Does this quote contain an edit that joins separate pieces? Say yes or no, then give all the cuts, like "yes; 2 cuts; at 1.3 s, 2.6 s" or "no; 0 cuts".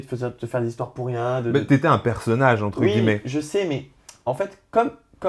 no; 0 cuts